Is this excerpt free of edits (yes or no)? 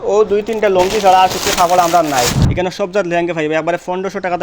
no